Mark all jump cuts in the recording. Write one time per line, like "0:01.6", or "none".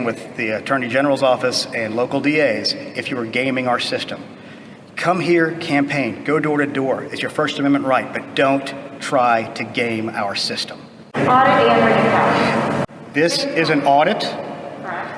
0:11.1